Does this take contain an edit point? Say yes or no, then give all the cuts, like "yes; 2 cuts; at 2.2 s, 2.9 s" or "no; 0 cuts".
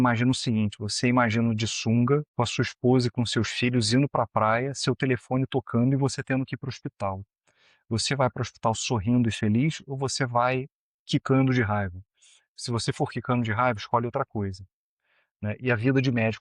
yes; 1 cut; at 2.3 s